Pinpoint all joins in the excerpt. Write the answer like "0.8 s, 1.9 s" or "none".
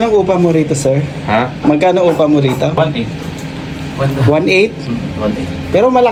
none